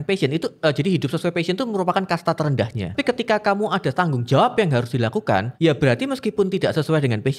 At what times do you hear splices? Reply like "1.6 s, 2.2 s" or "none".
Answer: 2.9 s, 5.5 s